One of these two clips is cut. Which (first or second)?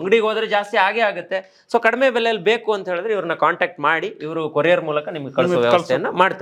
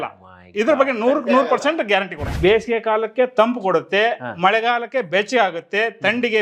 second